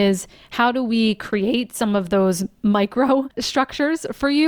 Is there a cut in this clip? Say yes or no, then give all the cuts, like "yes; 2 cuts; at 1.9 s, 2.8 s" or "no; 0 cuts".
yes; 1 cut; at 3.4 s